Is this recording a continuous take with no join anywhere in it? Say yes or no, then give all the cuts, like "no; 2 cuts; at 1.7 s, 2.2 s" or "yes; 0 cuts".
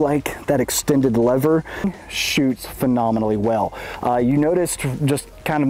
yes; 0 cuts